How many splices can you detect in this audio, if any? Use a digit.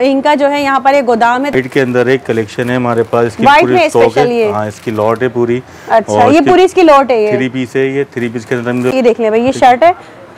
2